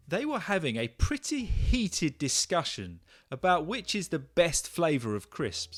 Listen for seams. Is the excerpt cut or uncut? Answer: uncut